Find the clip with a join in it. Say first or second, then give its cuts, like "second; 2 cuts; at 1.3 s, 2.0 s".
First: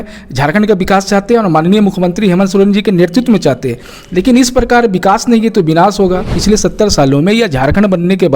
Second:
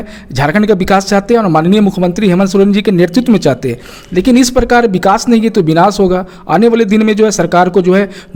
first; 1 cut; at 6.3 s